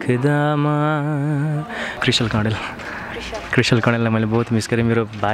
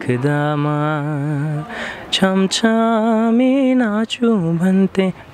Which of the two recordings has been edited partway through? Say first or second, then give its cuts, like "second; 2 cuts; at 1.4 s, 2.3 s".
first; 1 cut; at 1.8 s